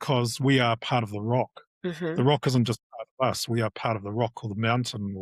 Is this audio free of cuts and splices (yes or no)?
yes